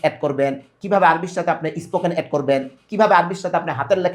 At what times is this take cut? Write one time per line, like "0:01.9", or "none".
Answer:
none